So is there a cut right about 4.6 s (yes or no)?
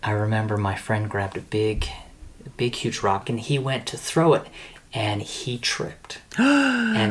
no